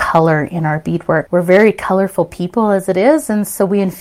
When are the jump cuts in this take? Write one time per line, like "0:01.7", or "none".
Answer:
0:01.3